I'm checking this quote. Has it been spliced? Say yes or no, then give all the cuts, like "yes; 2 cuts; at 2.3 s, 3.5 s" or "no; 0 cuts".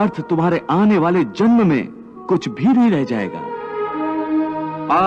no; 0 cuts